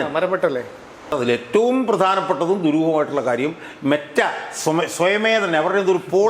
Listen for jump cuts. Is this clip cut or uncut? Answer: cut